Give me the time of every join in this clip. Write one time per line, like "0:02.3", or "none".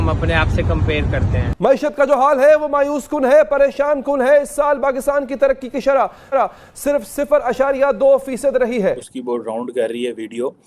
0:01.5
0:09.1